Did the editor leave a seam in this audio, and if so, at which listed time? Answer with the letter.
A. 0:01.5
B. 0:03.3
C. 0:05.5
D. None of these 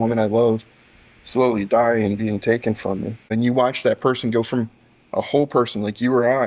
B